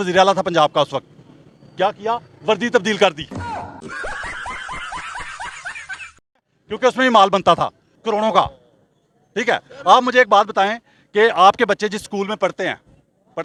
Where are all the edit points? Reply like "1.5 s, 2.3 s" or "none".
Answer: none